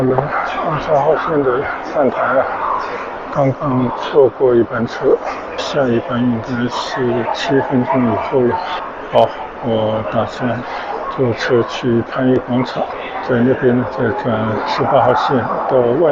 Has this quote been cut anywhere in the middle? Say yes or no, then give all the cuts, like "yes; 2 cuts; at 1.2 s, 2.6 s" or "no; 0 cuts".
no; 0 cuts